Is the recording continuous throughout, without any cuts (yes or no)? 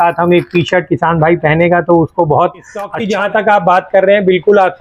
no